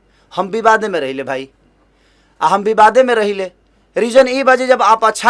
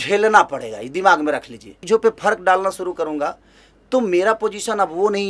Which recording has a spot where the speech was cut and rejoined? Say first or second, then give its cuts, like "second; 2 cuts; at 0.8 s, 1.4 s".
second; 1 cut; at 1.7 s